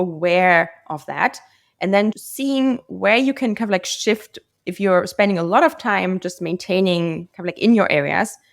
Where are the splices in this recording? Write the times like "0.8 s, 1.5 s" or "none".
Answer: 2.3 s